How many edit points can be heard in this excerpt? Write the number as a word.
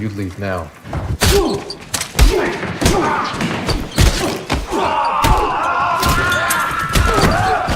one